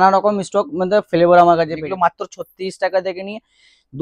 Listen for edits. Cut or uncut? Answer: cut